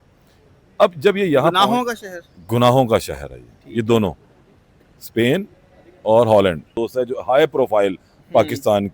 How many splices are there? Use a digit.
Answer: 1